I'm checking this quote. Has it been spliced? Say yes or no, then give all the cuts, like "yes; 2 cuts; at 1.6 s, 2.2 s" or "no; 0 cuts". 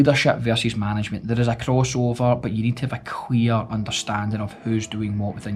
no; 0 cuts